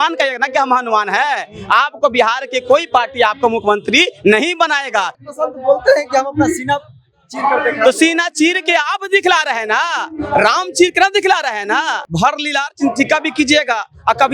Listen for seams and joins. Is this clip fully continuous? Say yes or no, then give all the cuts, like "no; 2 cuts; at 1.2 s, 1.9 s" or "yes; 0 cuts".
no; 2 cuts; at 5.1 s, 12.0 s